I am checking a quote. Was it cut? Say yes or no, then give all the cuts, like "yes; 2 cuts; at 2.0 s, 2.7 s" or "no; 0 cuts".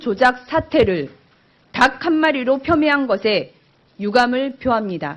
yes; 1 cut; at 2.0 s